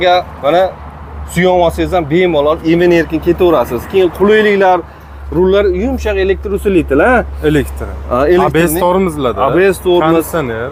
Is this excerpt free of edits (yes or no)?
yes